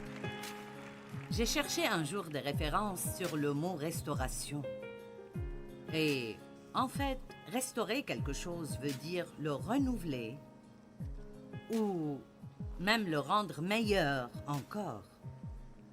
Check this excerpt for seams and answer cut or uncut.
cut